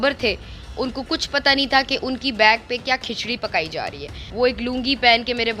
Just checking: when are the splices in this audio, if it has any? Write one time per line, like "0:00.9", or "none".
0:04.2